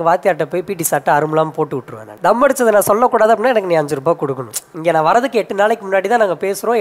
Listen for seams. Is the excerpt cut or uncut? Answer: cut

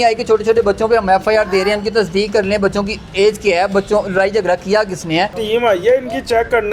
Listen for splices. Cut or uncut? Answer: cut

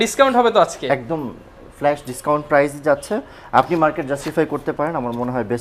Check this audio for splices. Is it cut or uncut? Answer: uncut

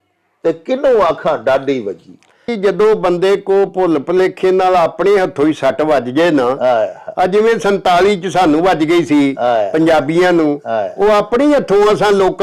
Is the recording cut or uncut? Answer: cut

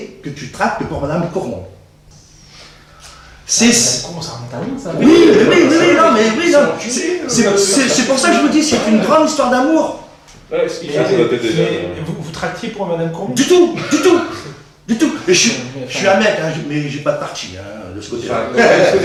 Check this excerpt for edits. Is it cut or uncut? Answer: uncut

